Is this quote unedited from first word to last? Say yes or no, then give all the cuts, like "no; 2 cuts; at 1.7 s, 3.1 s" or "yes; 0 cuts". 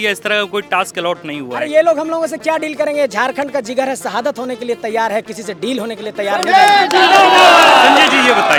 yes; 0 cuts